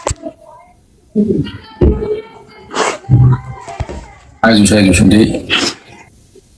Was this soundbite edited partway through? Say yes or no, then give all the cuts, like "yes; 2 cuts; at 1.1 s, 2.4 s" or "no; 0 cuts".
no; 0 cuts